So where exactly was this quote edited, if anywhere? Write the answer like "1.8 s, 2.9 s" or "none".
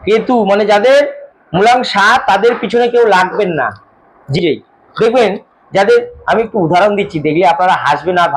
4.4 s